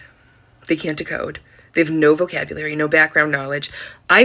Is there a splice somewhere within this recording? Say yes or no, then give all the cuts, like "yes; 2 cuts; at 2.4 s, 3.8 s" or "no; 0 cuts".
no; 0 cuts